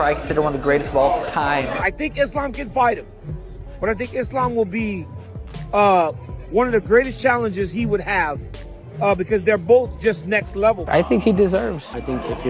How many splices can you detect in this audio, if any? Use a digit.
2